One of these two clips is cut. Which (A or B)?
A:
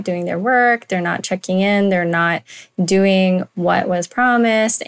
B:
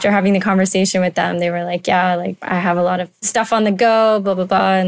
B